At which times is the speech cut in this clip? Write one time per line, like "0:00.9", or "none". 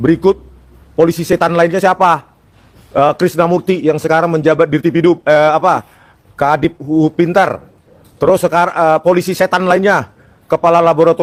none